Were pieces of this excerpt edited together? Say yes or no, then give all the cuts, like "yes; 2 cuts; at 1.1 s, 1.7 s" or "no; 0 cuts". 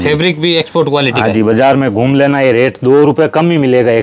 no; 0 cuts